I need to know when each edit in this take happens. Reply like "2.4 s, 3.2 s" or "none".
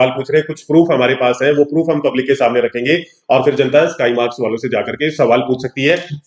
none